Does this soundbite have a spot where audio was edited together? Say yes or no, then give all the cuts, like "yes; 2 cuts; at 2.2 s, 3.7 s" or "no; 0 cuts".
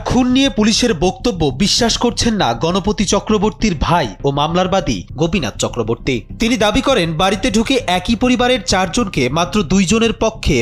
no; 0 cuts